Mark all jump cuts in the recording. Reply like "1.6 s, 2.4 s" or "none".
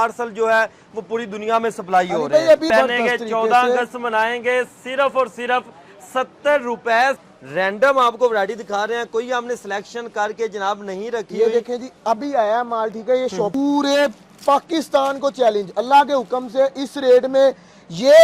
2.7 s, 7.2 s, 13.5 s